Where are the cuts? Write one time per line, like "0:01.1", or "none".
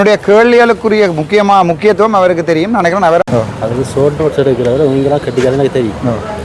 0:03.2

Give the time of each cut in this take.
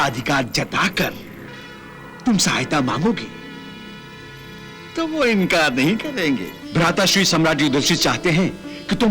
0:06.6

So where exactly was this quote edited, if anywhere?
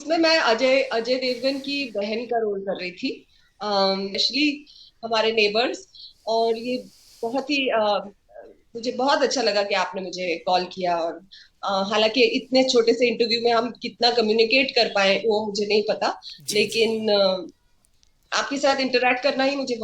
0:04.2

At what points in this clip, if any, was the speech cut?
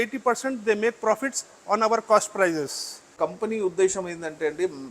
0:03.1

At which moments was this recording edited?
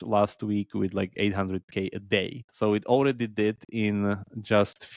0:02.4

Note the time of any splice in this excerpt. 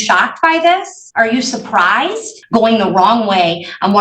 0:01.0
0:02.3

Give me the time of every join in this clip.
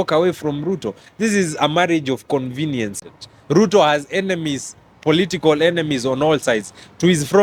0:03.0

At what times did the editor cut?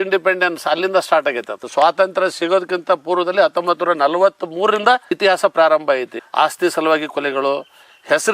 0:01.6
0:05.1

